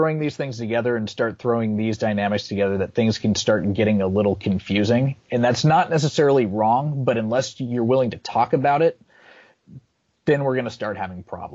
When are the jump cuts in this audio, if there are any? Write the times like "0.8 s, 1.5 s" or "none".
none